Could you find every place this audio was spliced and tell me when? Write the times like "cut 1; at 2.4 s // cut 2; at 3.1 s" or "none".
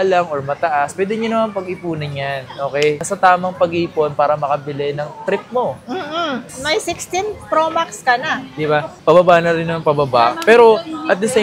cut 1; at 6.5 s